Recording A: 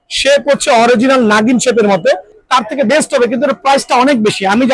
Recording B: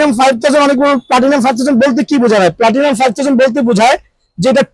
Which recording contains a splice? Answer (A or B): A